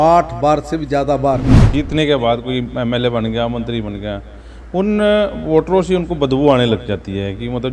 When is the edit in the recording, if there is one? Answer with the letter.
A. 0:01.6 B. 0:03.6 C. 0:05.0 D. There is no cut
A